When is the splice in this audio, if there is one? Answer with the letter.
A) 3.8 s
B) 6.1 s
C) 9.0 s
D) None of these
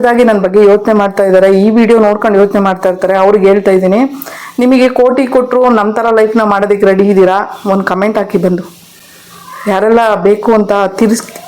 D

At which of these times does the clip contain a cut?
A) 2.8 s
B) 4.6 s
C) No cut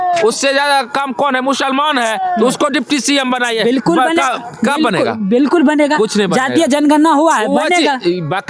C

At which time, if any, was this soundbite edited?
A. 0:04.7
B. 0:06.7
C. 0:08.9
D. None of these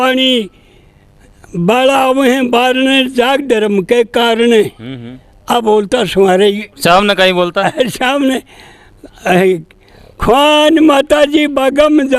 B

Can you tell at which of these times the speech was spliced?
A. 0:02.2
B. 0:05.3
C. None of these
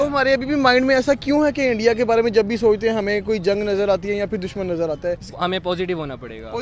B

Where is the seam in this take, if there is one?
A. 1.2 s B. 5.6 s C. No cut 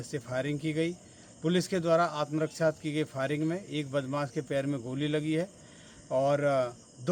C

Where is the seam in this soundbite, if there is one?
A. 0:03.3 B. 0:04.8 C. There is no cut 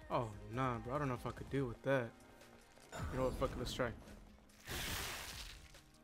C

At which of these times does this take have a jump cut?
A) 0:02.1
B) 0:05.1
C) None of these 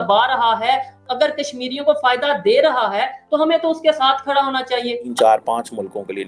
B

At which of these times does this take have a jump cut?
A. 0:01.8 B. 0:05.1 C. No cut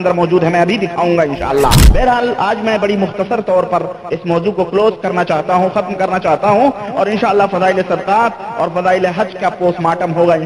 A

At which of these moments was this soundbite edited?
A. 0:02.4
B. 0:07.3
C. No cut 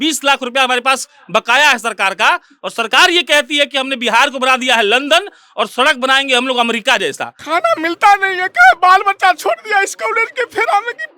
B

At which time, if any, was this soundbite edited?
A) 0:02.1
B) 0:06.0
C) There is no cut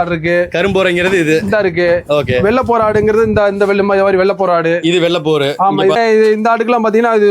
B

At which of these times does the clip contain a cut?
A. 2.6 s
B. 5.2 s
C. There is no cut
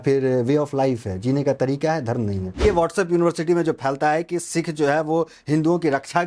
A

